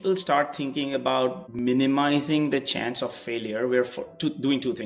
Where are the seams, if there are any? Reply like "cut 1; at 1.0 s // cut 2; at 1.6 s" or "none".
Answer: cut 1; at 1.5 s